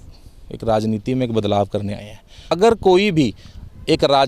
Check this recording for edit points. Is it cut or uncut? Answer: cut